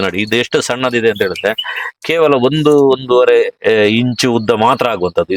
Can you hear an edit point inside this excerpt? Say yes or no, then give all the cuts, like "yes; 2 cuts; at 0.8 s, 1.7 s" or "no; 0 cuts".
no; 0 cuts